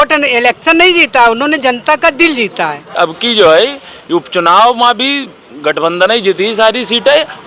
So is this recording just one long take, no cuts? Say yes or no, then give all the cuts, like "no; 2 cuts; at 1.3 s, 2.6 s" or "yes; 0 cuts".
no; 1 cut; at 2.8 s